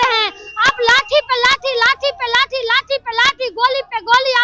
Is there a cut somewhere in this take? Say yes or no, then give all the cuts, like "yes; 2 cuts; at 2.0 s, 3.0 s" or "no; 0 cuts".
no; 0 cuts